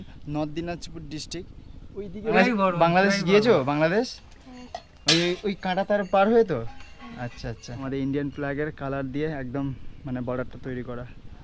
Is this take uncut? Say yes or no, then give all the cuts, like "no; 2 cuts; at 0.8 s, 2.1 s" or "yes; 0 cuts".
no; 2 cuts; at 2.3 s, 7.7 s